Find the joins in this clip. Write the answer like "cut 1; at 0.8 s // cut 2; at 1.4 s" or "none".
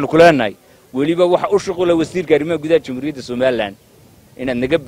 none